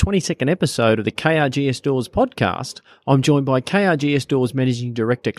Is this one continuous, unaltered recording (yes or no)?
yes